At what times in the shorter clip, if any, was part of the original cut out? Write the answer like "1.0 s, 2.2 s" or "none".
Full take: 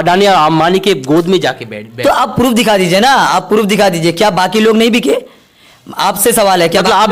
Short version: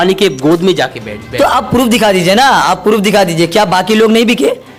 none